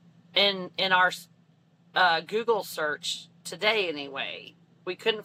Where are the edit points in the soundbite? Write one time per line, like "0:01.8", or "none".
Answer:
none

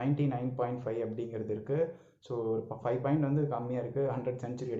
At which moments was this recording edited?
none

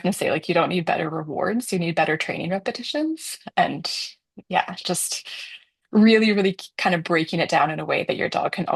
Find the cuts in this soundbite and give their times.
none

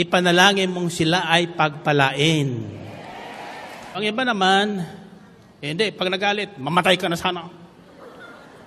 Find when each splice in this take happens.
0:04.0

